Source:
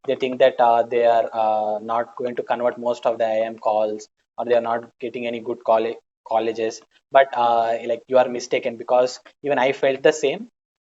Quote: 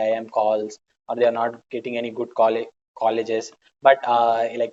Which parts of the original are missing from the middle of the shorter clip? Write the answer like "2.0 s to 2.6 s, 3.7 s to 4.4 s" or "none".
none